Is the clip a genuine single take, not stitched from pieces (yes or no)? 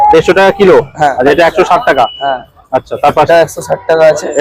no